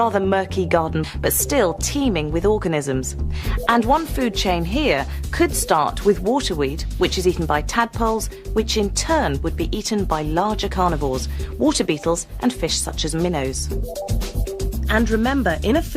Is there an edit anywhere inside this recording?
yes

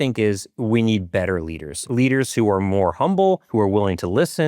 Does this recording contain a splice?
yes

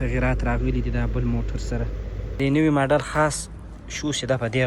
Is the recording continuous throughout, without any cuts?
no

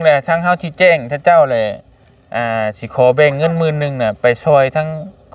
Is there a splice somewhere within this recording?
no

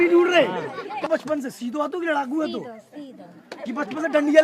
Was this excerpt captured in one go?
no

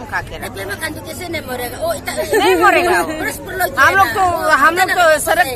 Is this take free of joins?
yes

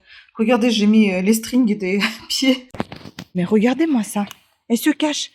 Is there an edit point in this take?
yes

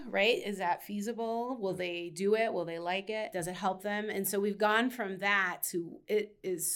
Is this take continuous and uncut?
no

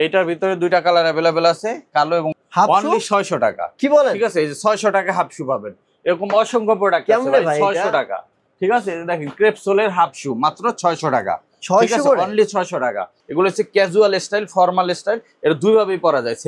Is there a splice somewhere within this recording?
yes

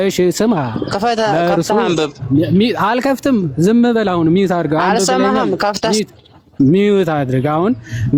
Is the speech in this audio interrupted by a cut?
no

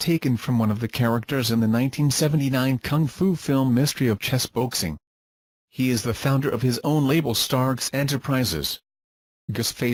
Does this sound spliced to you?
no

